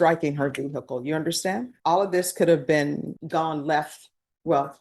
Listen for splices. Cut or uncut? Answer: cut